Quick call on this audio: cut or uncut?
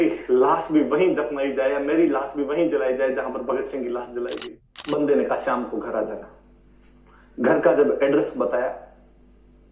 cut